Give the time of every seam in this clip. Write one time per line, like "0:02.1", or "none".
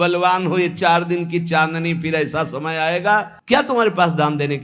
0:03.3

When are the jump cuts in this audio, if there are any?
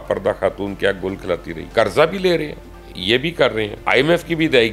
0:01.6
0:03.8

